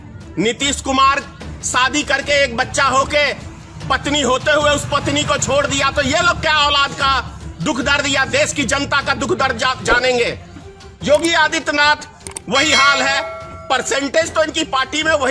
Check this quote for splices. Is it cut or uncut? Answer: uncut